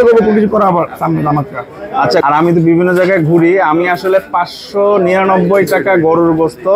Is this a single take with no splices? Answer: no; 1 cut; at 2.2 s

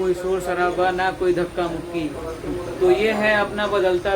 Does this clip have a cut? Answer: no; 0 cuts

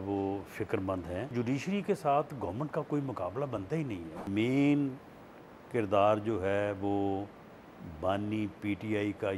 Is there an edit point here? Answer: yes; 2 cuts; at 1.3 s, 4.3 s

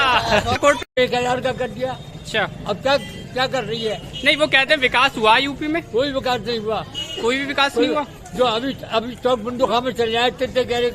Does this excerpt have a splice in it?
yes; 1 cut; at 1.0 s

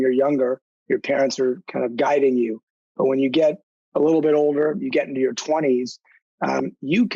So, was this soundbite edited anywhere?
no; 0 cuts

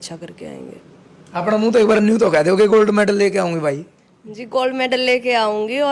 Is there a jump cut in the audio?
no; 0 cuts

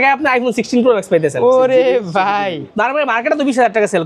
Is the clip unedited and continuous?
no; 1 cut; at 2.6 s

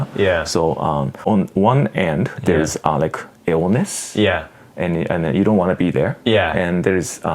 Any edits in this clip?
yes; 1 cut; at 1.2 s

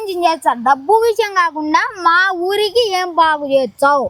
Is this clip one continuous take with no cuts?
yes; 0 cuts

